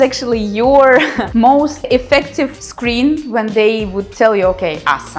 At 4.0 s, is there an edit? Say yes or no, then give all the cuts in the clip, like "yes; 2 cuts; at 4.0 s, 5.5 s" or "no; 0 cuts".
no; 1 cut; at 1.6 s